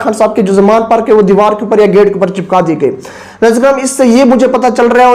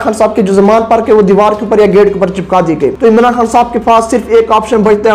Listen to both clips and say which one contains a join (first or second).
second